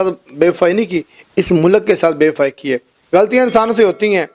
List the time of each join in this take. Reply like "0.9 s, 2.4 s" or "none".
none